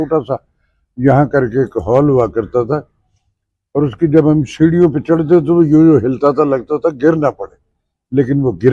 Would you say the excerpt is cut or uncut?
uncut